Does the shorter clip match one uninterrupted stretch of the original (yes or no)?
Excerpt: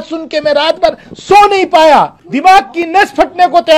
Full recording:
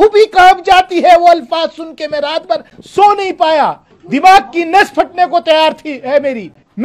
no